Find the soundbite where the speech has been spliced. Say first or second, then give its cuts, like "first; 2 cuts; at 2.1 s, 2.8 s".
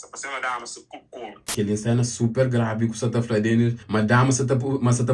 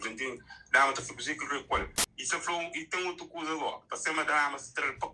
first; 2 cuts; at 1.5 s, 3.8 s